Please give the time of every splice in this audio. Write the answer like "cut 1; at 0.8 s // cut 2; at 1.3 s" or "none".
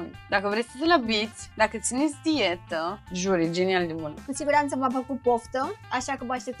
cut 1; at 1.4 s // cut 2; at 3.0 s // cut 3; at 4.2 s